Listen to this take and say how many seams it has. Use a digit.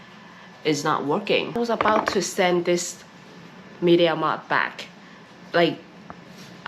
1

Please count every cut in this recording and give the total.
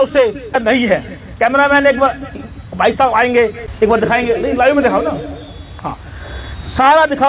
2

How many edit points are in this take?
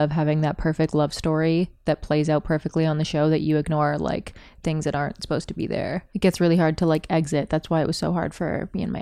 1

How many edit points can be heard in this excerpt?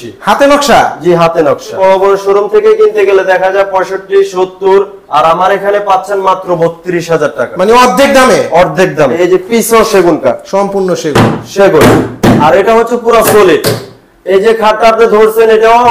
2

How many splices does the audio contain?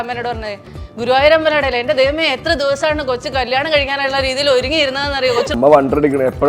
1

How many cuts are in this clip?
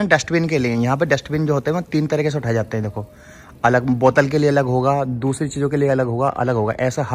0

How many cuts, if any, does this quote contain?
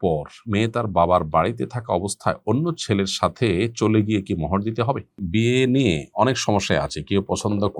1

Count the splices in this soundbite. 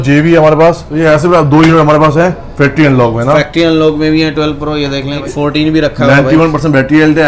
2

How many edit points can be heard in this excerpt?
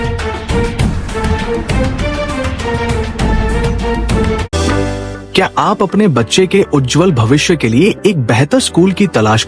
1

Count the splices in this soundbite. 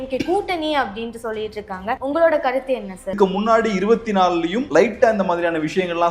3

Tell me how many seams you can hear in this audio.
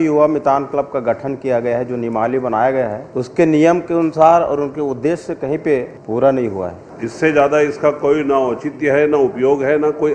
3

